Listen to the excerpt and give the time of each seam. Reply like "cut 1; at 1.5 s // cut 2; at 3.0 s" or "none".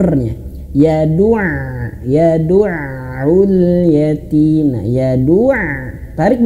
none